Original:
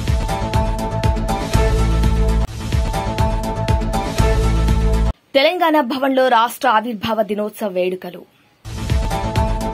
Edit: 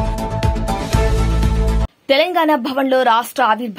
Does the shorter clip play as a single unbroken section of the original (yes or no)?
no